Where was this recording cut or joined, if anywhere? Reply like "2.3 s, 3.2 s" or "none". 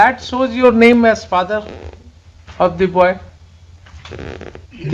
none